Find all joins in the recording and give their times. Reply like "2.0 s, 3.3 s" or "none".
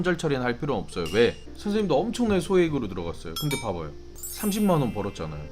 1.5 s, 4.4 s